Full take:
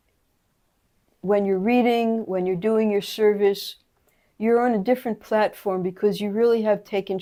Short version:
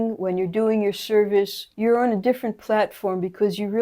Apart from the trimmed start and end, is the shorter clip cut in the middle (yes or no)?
yes